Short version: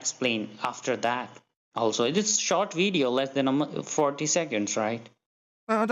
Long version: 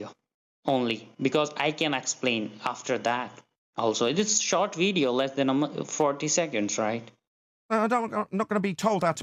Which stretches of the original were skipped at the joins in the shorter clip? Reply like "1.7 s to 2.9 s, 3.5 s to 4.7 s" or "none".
none